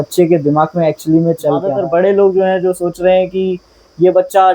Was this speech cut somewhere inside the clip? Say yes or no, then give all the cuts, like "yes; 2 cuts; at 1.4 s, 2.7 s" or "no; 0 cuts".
yes; 1 cut; at 1.7 s